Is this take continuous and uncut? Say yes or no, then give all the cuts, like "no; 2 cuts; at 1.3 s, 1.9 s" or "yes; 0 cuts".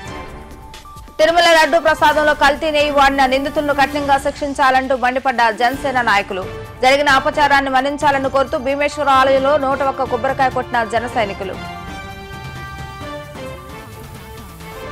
no; 1 cut; at 0.9 s